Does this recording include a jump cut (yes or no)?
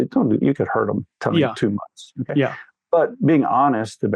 no